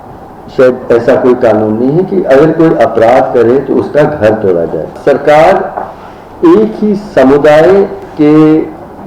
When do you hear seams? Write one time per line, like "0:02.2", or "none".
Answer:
0:05.0
0:08.1

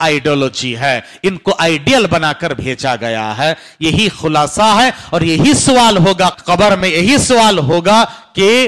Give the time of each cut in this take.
0:06.4

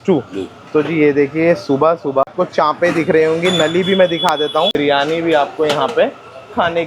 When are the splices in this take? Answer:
0:02.3
0:04.7

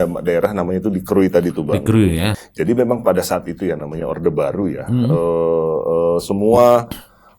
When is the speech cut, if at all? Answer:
0:02.4

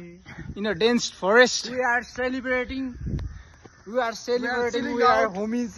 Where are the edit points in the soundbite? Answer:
none

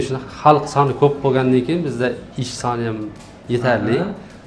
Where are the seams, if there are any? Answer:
none

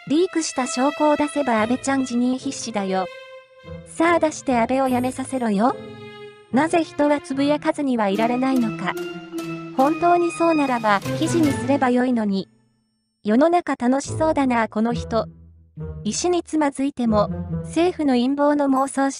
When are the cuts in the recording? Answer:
0:07.5

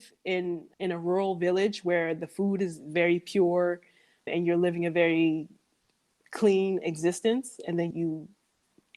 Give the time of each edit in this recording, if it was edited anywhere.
0:07.9

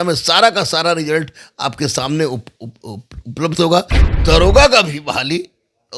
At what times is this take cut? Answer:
0:04.0

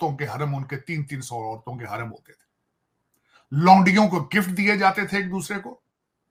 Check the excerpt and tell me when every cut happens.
none

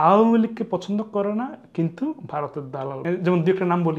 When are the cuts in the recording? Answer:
0:03.0

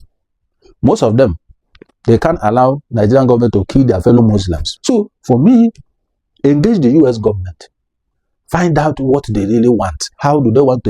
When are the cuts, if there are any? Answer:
0:04.6

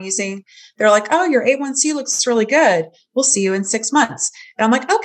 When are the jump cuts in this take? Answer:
none

